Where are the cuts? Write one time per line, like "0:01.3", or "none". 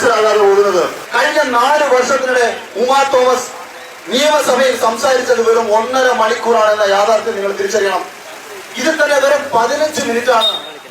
0:01.0